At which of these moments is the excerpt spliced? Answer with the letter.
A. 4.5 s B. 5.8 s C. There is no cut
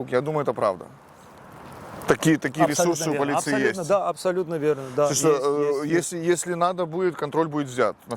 C